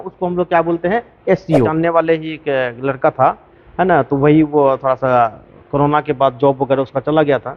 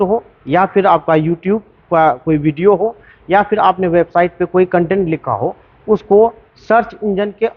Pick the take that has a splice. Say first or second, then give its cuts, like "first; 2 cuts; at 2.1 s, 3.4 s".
first; 1 cut; at 1.7 s